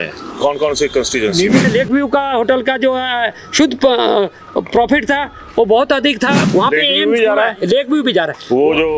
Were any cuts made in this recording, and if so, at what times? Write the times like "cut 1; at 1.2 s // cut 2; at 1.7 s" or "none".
cut 1; at 1.6 s // cut 2; at 6.4 s